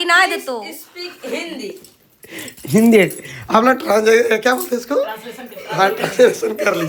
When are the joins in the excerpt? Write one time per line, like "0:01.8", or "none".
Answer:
none

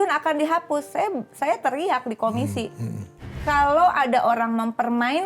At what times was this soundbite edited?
0:03.3

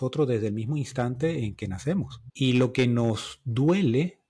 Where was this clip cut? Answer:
0:02.2

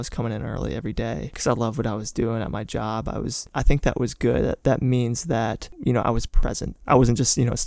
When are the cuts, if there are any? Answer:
0:03.5
0:05.7
0:06.7

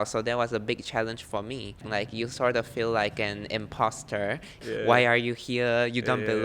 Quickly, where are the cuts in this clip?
0:01.8
0:04.6

